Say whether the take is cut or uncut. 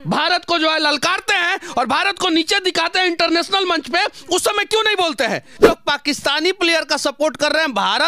cut